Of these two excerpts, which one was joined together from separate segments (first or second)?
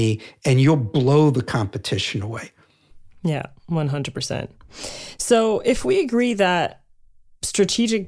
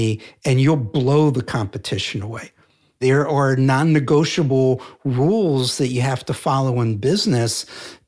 second